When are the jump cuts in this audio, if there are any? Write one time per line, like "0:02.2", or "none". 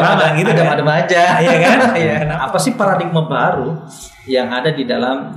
0:02.3